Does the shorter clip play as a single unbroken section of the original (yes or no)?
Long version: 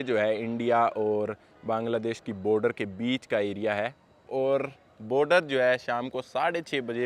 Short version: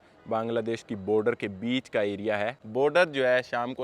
no